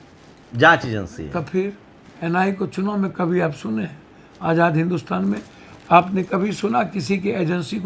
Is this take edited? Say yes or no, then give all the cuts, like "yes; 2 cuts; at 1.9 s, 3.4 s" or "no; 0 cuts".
no; 0 cuts